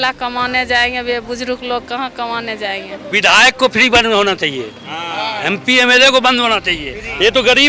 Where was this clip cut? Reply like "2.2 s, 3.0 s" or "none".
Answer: 3.0 s